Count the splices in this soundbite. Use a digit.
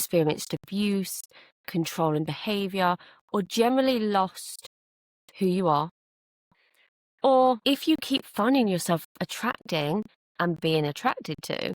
1